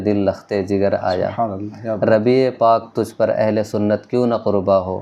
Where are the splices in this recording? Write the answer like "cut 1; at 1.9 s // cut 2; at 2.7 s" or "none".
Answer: none